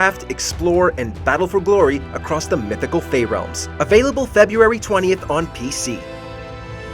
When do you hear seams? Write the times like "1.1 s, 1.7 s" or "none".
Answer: 3.6 s, 6.0 s

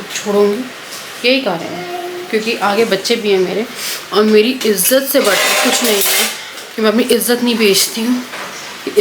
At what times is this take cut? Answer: none

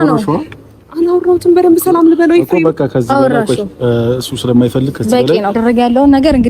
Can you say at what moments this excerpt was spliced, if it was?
5.5 s

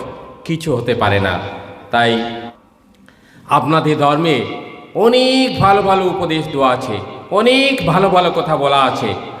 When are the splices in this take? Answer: 2.5 s

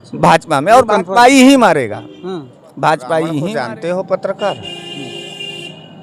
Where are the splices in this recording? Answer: 3.5 s

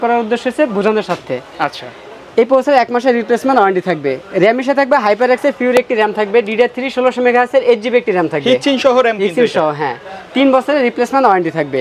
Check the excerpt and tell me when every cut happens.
none

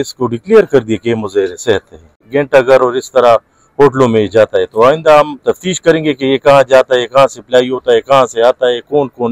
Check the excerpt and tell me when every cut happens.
2.2 s

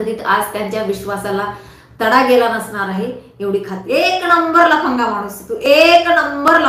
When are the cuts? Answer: 3.8 s

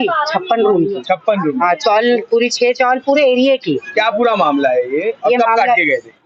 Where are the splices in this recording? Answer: none

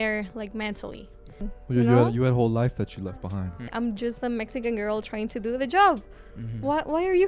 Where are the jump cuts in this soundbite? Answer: 1.5 s, 3.4 s

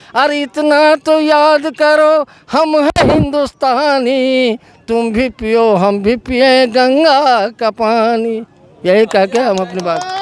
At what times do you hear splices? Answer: none

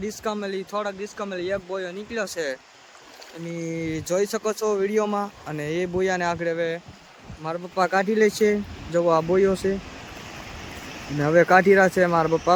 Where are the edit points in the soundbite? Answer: none

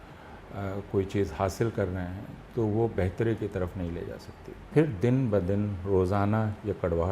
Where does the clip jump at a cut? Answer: 4.7 s

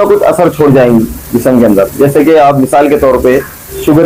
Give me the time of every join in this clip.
none

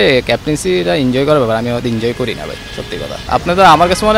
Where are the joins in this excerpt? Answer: 3.2 s

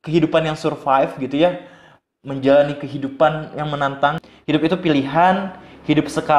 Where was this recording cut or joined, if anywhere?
4.3 s

